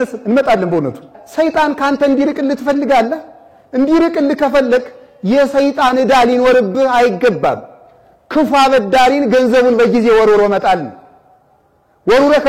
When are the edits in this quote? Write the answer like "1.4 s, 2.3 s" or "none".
1.2 s